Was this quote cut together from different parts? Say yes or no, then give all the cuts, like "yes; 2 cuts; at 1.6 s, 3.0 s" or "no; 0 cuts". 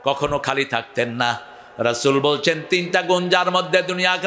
no; 0 cuts